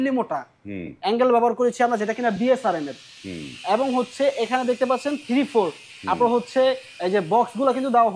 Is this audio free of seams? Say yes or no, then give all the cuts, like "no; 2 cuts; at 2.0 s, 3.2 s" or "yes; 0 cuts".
yes; 0 cuts